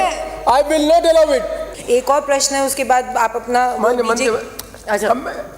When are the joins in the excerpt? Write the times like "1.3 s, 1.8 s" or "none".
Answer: 1.7 s